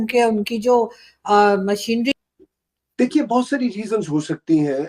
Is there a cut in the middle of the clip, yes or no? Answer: yes